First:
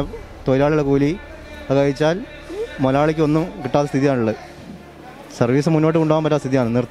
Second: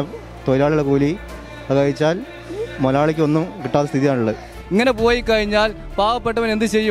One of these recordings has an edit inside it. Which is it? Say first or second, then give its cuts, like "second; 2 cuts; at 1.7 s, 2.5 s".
second; 1 cut; at 4.5 s